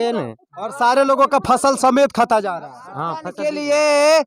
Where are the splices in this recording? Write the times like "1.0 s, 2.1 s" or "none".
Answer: 3.3 s

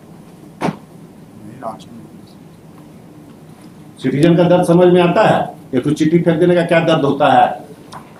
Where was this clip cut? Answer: none

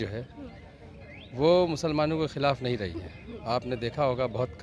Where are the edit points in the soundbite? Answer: none

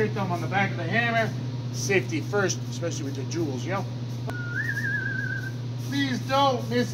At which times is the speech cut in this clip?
4.3 s

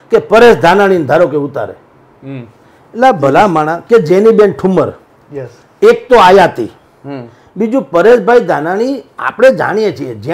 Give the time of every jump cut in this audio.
none

